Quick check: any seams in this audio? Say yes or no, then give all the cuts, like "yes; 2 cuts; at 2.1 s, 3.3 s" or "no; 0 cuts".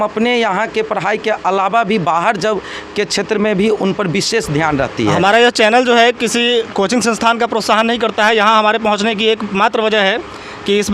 yes; 1 cut; at 5.1 s